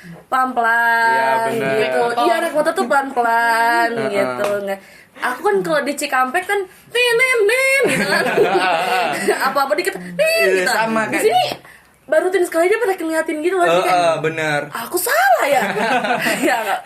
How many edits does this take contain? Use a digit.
0